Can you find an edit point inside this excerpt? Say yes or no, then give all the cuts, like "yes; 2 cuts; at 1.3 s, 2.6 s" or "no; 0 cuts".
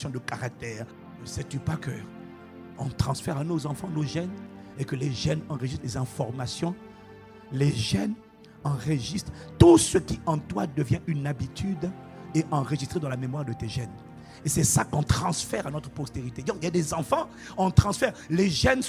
yes; 1 cut; at 1.0 s